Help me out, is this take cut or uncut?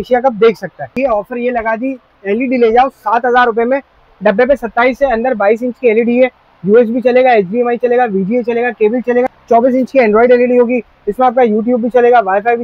cut